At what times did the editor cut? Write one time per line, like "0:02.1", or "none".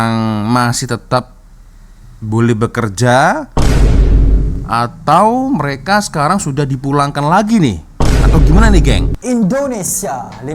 0:09.1